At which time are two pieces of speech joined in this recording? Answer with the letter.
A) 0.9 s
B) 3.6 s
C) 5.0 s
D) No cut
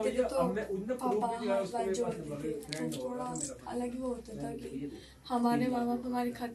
D